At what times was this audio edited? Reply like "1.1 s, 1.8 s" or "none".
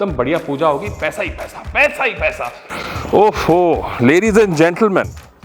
2.6 s